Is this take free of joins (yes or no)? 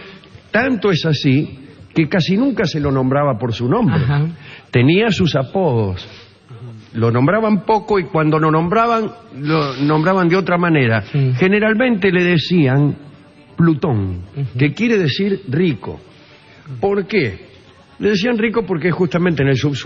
no